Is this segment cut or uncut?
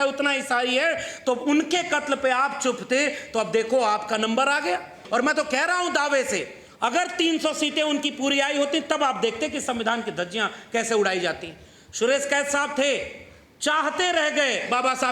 cut